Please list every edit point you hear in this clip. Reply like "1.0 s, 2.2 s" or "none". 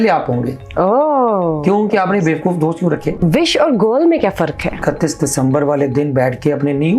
3.2 s, 4.8 s